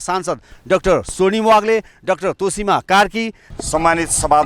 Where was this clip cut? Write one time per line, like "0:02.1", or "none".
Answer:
0:03.4